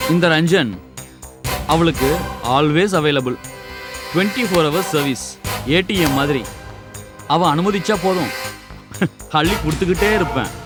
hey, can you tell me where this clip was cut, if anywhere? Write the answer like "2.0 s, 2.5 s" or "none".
none